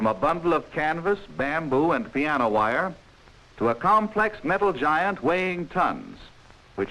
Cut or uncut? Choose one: cut